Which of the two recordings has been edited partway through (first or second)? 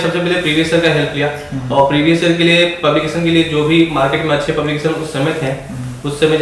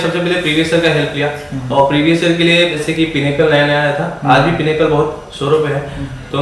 second